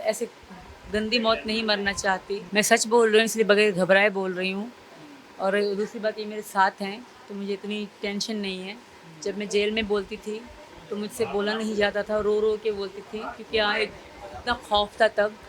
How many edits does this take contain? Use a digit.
1